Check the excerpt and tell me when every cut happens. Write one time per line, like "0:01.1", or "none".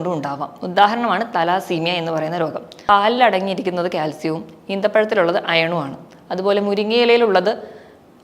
0:02.7